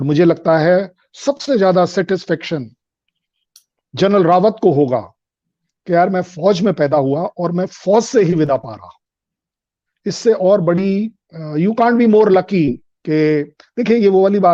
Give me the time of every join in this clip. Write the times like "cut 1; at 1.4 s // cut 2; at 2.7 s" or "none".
none